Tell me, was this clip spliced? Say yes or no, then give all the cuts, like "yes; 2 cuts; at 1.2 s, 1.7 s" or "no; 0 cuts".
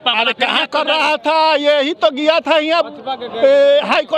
no; 0 cuts